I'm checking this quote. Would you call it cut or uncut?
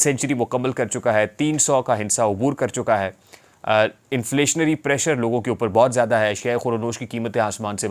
uncut